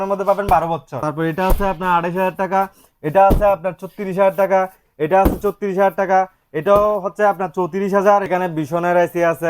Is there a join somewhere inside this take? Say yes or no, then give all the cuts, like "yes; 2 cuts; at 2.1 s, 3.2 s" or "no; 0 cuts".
yes; 2 cuts; at 1.0 s, 8.3 s